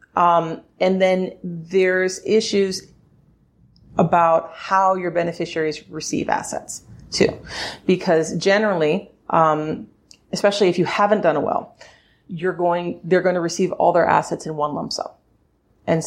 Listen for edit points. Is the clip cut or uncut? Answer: uncut